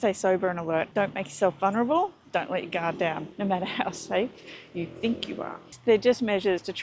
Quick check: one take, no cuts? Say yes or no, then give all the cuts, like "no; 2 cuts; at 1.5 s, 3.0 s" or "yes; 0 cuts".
no; 3 cuts; at 0.9 s, 3.3 s, 5.7 s